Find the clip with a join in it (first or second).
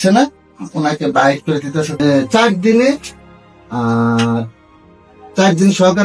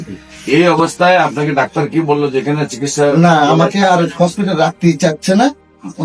first